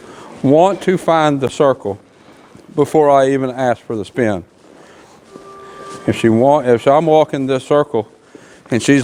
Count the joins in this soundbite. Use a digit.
0